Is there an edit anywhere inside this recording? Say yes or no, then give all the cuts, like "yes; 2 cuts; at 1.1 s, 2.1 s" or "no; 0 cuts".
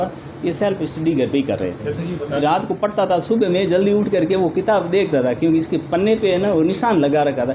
yes; 1 cut; at 2.4 s